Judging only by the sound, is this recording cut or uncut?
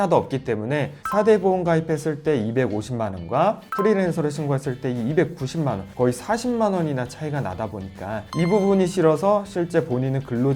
cut